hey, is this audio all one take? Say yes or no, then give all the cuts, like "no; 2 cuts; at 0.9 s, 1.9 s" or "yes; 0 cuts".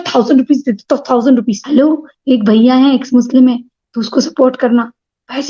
no; 1 cut; at 1.6 s